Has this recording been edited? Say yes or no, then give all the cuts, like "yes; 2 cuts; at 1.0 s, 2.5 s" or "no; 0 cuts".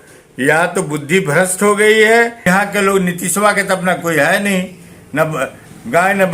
yes; 1 cut; at 2.4 s